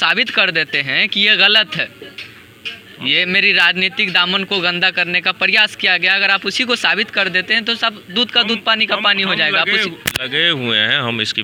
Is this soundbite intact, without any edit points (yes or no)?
yes